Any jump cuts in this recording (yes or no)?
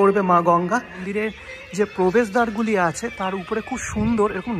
yes